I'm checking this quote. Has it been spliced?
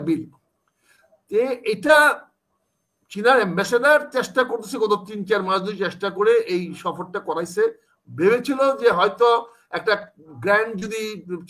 no; 0 cuts

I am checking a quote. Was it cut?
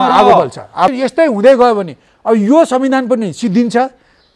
yes; 1 cut; at 0.9 s

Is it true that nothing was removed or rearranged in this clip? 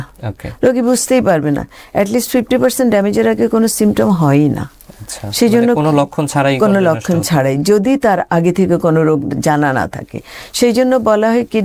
yes; 0 cuts

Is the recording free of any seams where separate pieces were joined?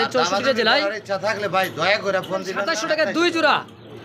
no; 1 cut; at 2.7 s

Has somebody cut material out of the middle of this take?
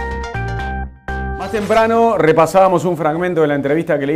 yes; 1 cut; at 1.4 s

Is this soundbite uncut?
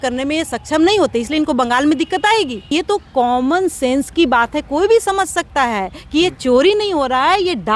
no; 1 cut; at 2.7 s

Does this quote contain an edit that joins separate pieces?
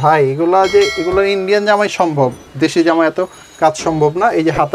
no; 0 cuts

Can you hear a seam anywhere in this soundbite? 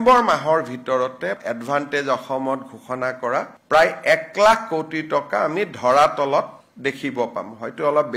yes; 1 cut; at 1.4 s

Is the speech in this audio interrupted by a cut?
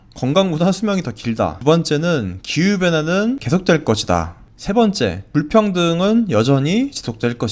yes; 3 cuts; at 1.6 s, 3.4 s, 5.2 s

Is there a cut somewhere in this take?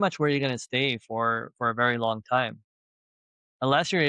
no; 0 cuts

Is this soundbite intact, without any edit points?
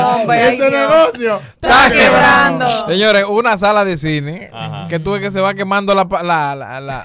yes; 0 cuts

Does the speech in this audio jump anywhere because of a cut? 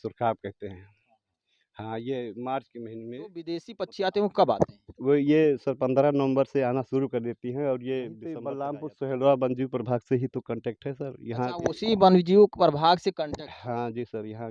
yes; 2 cuts; at 3.7 s, 8.5 s

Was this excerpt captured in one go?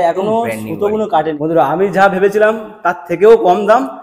no; 1 cut; at 1.4 s

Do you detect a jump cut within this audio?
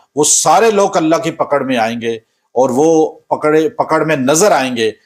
no; 0 cuts

